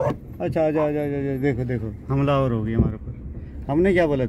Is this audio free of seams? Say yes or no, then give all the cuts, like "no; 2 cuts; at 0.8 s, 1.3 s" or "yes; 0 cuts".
yes; 0 cuts